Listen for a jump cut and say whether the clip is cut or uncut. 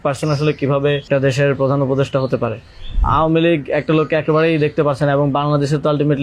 cut